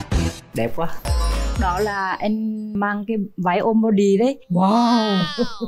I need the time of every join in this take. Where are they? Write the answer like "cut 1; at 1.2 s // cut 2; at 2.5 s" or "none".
cut 1; at 1.0 s // cut 2; at 2.8 s